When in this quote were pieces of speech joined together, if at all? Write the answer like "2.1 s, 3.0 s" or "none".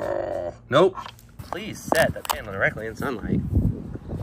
1.2 s